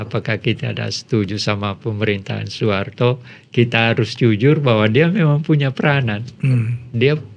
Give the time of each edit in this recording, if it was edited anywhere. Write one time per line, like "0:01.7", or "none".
none